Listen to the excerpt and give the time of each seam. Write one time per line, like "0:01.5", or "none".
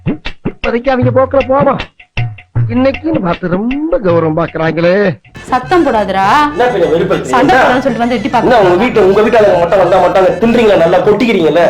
0:05.3

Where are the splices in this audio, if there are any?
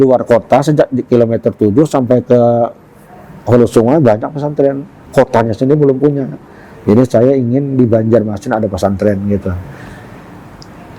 none

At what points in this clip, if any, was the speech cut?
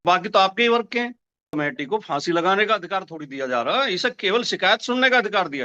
0:01.5

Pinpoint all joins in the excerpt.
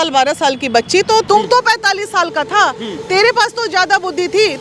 0:01.2

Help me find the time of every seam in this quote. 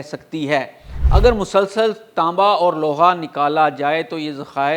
0:00.9

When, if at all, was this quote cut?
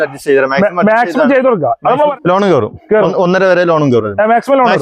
0:02.1

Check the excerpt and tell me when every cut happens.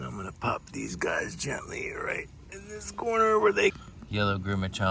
0:03.7

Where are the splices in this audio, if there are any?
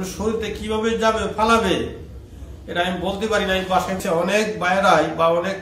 0:04.0

